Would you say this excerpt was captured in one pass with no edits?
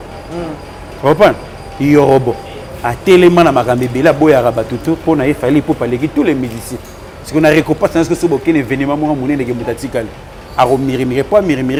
yes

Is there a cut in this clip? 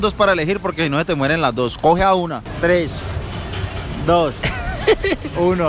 no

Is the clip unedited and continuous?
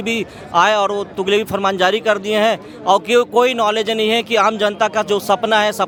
yes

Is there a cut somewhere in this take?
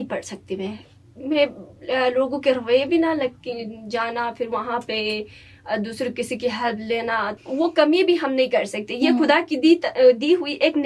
yes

